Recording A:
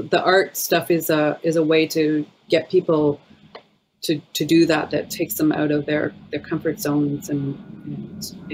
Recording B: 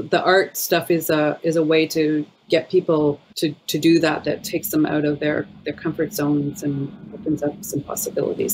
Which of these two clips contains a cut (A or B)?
B